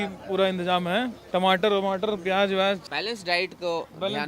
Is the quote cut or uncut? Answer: cut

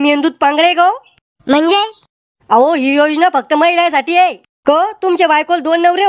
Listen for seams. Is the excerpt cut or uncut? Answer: cut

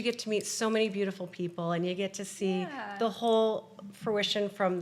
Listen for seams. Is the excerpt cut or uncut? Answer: uncut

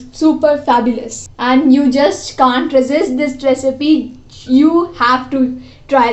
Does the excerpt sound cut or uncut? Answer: uncut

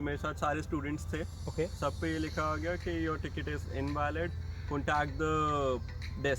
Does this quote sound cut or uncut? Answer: uncut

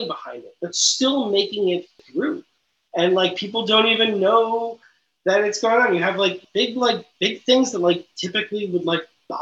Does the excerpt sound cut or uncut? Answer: cut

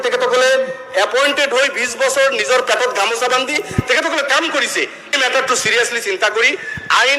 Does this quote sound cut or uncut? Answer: cut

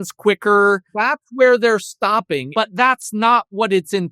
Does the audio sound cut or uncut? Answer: cut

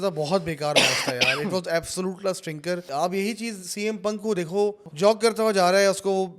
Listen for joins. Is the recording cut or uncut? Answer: cut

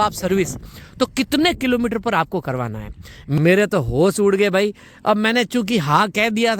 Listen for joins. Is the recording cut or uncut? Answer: cut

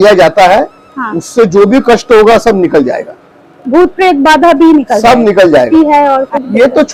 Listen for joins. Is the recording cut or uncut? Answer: uncut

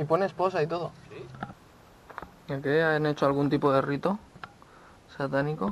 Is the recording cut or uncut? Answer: cut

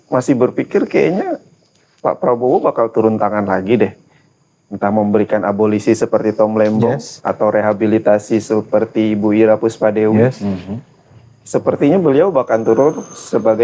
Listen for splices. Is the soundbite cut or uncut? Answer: uncut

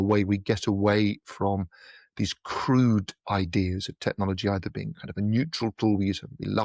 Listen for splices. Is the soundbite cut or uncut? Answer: uncut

